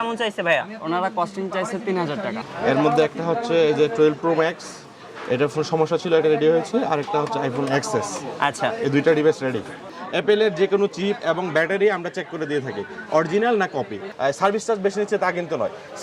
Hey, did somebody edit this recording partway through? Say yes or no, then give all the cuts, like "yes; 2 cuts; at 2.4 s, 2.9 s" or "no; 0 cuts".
yes; 3 cuts; at 2.4 s, 9.9 s, 14.0 s